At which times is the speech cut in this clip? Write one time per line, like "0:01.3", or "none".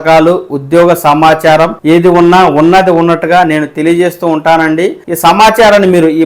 0:01.8
0:05.0